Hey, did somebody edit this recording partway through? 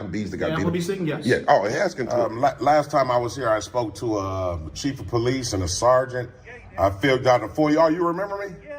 yes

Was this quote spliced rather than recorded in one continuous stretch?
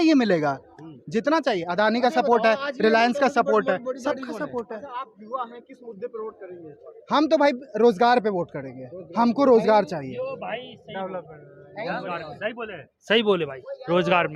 no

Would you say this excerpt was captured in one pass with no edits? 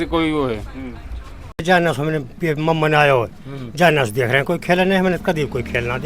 no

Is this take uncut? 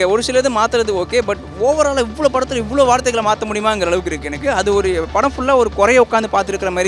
yes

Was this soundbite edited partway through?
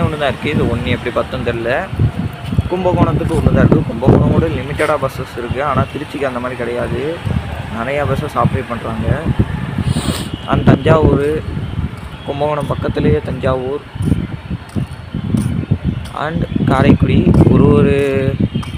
no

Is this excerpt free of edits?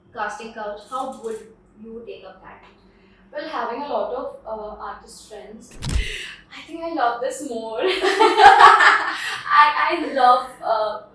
no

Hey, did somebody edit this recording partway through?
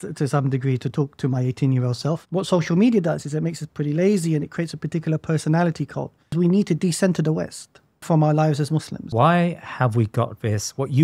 yes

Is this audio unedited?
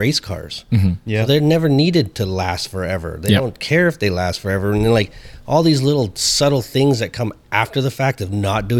yes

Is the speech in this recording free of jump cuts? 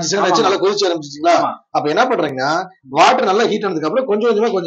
yes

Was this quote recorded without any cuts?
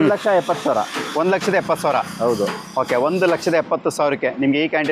yes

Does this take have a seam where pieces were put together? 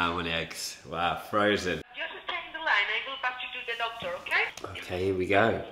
yes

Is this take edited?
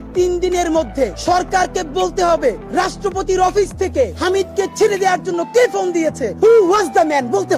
yes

